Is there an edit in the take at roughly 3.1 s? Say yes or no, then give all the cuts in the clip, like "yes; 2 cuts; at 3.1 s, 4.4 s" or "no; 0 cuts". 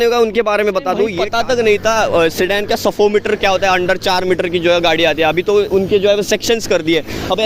no; 1 cut; at 1.2 s